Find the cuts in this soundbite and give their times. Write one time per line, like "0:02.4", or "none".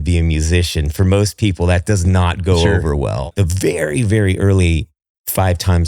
0:03.3